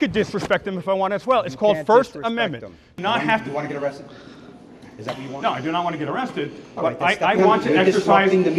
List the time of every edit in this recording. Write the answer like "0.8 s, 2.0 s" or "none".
2.9 s